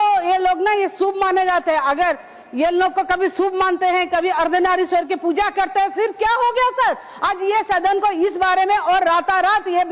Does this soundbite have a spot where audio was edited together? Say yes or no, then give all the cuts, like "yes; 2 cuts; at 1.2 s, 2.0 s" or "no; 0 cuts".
no; 0 cuts